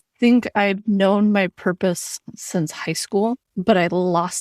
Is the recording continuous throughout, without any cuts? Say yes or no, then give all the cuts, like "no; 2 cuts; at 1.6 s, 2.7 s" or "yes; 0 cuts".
no; 1 cut; at 3.5 s